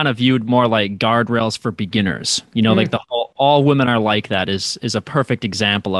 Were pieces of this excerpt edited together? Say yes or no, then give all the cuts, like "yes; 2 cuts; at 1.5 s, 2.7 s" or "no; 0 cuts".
no; 0 cuts